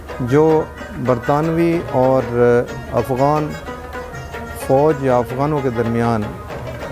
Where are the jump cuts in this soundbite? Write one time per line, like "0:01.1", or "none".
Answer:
none